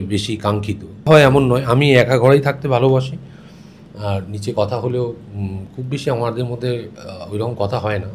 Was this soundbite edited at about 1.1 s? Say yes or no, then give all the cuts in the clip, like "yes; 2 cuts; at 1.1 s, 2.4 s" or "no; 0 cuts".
yes; 1 cut; at 1.1 s